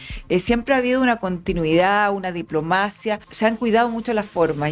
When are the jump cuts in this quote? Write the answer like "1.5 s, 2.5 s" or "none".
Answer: 3.3 s